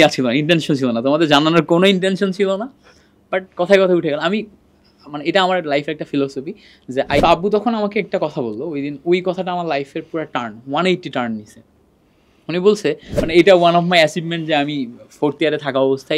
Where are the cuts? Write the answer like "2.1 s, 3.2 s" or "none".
7.2 s, 13.2 s